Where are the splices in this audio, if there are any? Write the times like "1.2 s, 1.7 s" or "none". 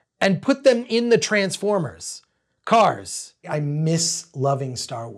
3.5 s